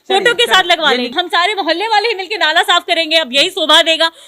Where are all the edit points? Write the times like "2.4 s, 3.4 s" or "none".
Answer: 1.1 s